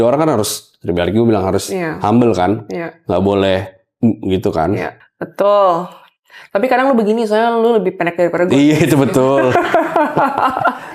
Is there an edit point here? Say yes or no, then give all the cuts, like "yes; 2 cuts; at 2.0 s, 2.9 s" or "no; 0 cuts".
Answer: no; 0 cuts